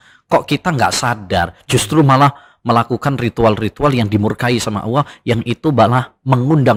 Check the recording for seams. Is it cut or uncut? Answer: uncut